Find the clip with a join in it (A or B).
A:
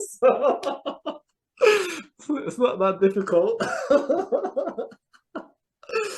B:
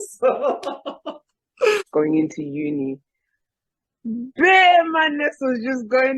B